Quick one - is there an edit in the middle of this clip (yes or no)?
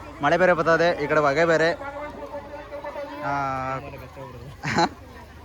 no